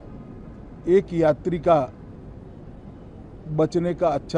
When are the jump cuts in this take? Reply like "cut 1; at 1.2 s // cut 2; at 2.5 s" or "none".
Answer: none

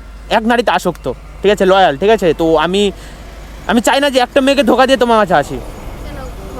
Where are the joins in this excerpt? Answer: none

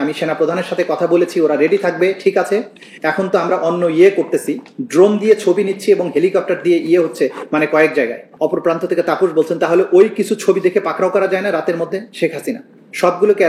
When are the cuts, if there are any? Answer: cut 1; at 8.2 s

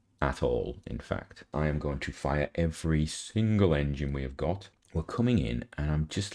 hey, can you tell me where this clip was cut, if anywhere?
cut 1; at 1.4 s // cut 2; at 4.8 s

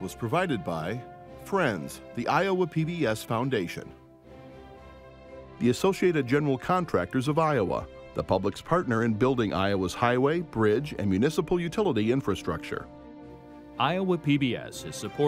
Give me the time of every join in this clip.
cut 1; at 3.9 s // cut 2; at 5.6 s

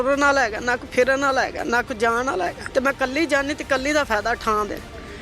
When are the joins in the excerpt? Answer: cut 1; at 2.6 s

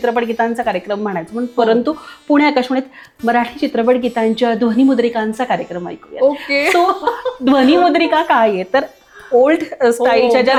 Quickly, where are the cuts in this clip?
none

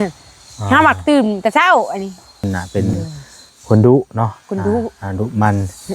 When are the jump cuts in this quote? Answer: cut 1; at 2.4 s

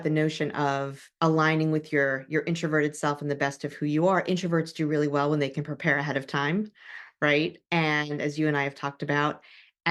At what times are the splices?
cut 1; at 1.0 s

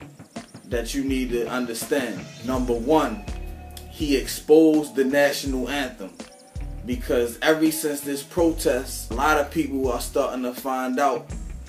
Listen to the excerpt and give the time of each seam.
none

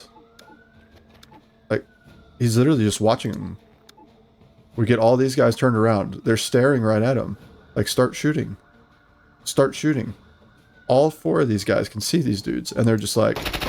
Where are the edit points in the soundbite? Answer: none

